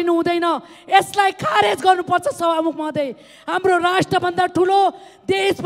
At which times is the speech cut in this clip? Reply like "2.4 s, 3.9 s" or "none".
none

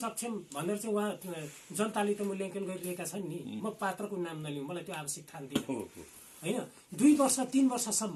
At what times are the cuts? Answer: none

